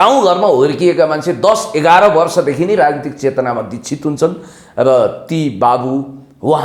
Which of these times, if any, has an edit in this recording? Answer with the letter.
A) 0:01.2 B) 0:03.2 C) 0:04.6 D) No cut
D